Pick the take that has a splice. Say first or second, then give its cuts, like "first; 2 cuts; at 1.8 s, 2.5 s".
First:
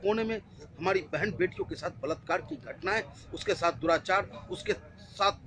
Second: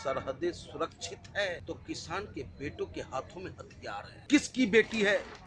second; 2 cuts; at 1.6 s, 4.2 s